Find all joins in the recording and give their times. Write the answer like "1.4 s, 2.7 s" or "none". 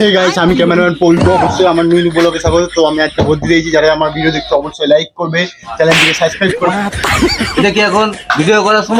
none